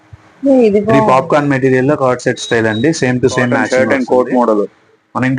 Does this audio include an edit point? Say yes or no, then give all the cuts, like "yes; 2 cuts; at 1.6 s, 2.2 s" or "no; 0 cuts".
yes; 2 cuts; at 1.0 s, 3.6 s